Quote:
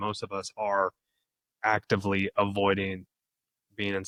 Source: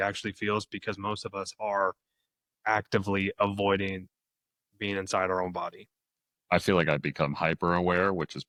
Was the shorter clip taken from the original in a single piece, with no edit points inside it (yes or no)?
yes